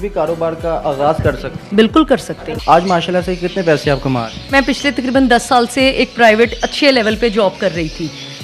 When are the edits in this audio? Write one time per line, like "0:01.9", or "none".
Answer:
0:02.5
0:04.5